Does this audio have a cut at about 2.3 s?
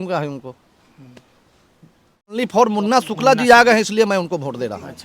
yes; 1 cut; at 2.3 s

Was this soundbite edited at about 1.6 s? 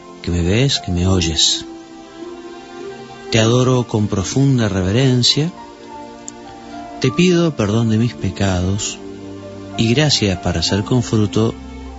no; 1 cut; at 8.7 s

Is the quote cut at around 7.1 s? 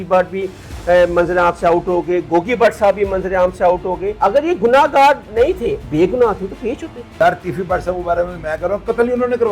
yes; 3 cuts; at 4.1 s, 5.8 s, 7.1 s

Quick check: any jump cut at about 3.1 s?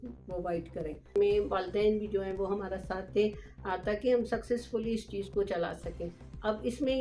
no; 1 cut; at 1.2 s

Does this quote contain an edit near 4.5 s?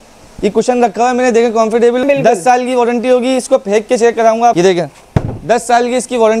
yes; 2 cuts; at 2.0 s, 4.5 s

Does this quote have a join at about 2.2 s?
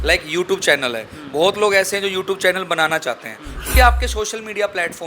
no; 1 cut; at 3.7 s

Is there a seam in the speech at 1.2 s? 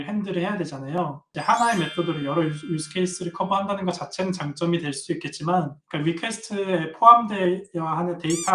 no; 1 cut; at 5.8 s

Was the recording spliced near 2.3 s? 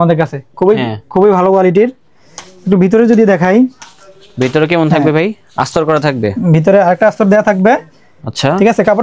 no; 0 cuts

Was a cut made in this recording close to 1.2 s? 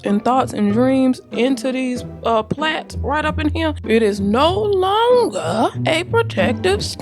no; 1 cut; at 5.8 s

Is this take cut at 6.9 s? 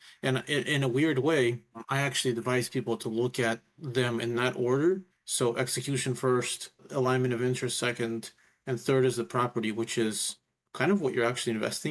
yes; 2 cuts; at 5.2 s, 6.9 s

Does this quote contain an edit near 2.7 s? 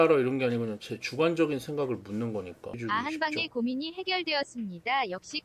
yes; 1 cut; at 2.7 s

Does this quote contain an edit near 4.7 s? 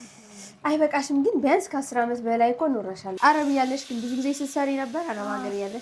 no; 1 cut; at 3.1 s

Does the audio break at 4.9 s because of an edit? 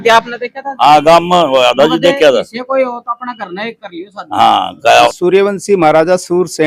yes; 1 cut; at 4.9 s

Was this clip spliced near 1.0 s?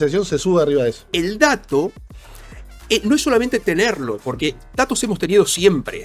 yes; 1 cut; at 1.0 s

